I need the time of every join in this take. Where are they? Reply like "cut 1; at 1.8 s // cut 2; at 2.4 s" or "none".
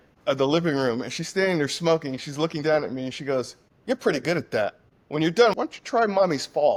none